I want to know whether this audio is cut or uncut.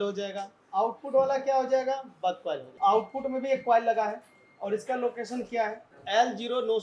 cut